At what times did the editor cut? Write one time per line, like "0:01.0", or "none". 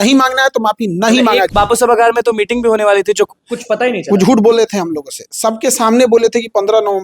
0:01.5